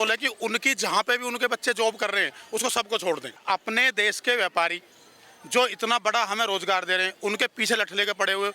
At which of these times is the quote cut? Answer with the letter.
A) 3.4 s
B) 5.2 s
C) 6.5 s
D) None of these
A